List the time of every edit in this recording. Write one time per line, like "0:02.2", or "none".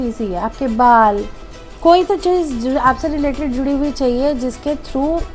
none

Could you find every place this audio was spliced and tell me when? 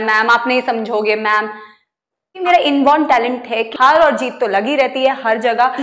0:02.4
0:03.7

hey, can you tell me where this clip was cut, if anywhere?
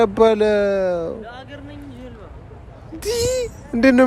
none

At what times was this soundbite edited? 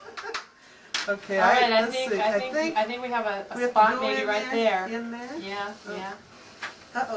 0:04.2

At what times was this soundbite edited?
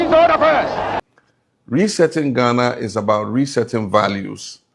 0:01.0

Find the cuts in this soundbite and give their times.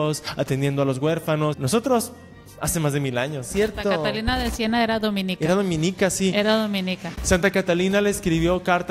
0:01.6
0:03.5

